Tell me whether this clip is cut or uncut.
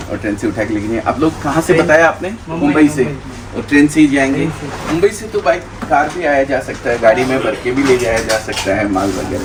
uncut